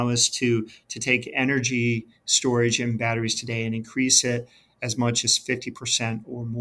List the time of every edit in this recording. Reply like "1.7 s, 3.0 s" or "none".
none